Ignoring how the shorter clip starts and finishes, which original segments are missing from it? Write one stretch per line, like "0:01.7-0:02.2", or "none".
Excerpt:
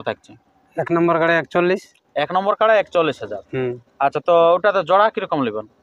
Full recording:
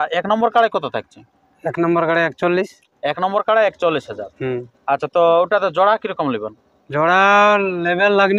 none

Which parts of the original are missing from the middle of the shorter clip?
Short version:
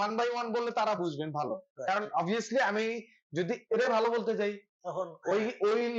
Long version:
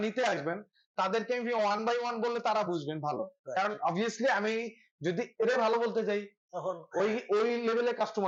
none

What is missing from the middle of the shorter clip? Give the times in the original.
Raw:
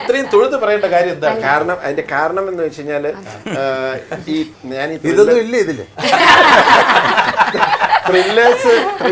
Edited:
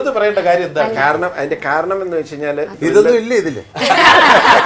0:03.2-0:05.0

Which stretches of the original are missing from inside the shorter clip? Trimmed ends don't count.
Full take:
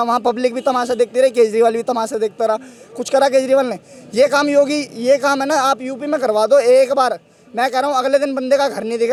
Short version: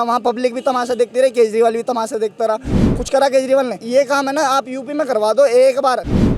0:03.8-0:04.9

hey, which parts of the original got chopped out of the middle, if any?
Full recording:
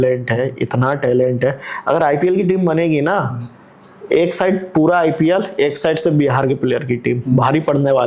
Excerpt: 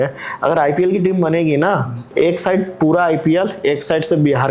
0:03.4-0:03.9

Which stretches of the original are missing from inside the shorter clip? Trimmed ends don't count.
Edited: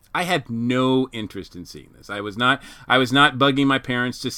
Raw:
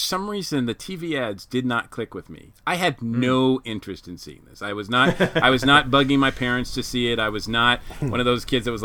none

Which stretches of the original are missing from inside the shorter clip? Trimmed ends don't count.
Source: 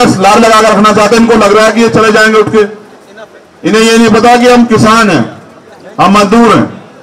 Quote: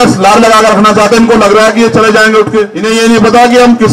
0:02.8-0:03.7

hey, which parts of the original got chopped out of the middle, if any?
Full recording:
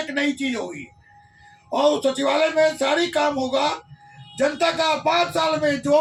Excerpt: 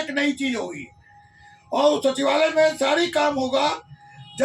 none

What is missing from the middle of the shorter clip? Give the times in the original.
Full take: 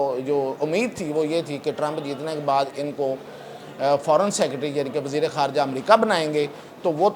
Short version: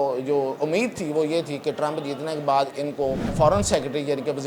0:03.3-0:04.0

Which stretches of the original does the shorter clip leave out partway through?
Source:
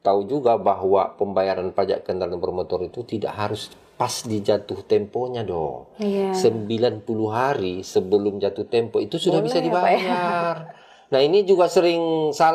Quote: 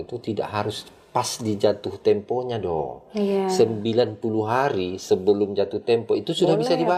none

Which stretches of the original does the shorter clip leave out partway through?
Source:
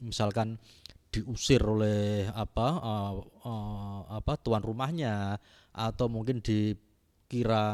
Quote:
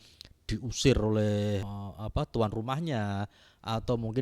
0:02.3-0:03.8

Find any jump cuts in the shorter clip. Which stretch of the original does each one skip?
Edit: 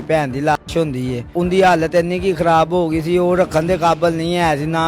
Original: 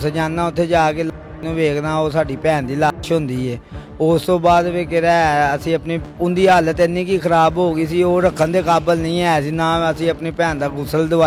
0:03.6-0:06.1

